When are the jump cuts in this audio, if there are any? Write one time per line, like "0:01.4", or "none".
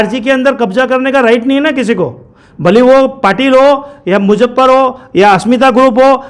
none